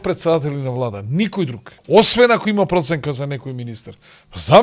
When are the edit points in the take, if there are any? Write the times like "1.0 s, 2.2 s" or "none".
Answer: 1.7 s